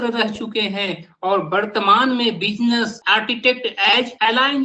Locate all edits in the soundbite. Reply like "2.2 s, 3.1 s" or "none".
none